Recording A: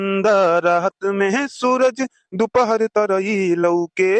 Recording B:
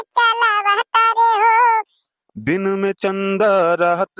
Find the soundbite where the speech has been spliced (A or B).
B